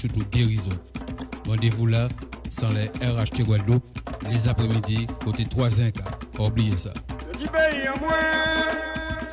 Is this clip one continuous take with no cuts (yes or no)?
yes